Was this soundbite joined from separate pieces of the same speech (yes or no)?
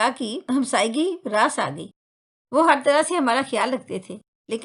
no